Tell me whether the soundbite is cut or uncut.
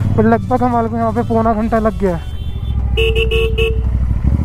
uncut